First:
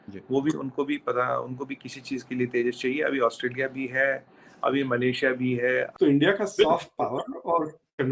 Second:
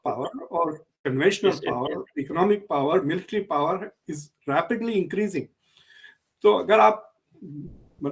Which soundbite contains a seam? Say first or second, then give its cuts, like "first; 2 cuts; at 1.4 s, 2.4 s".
first; 1 cut; at 5.9 s